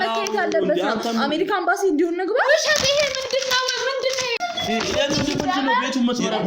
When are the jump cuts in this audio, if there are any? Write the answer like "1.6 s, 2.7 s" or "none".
4.4 s